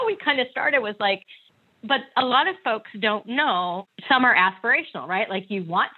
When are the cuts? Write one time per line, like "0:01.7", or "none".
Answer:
0:03.8